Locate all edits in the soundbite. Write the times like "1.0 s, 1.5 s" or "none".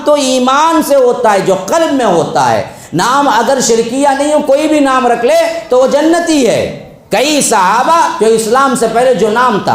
none

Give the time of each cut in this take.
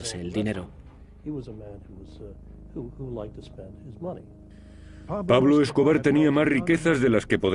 none

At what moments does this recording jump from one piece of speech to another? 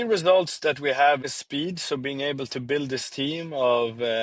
1.3 s

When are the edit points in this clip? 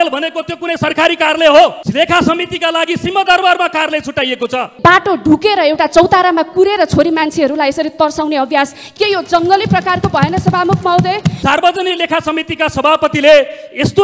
1.8 s, 4.7 s, 8.8 s, 11.3 s

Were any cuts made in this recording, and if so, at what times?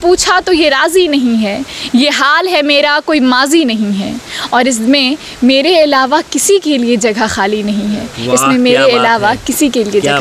none

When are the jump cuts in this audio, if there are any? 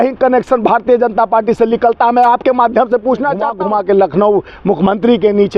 3.5 s

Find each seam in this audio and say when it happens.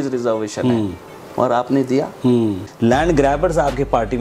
2.7 s

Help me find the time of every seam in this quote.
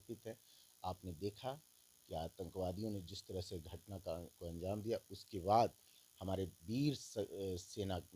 none

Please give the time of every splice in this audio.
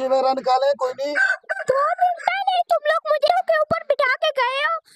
3.3 s

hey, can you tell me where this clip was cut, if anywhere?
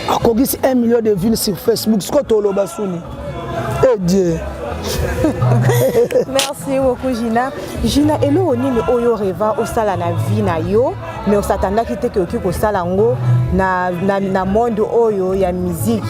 none

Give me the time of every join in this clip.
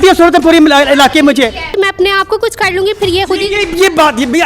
1.8 s

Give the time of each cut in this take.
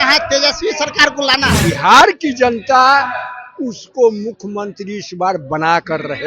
1.5 s

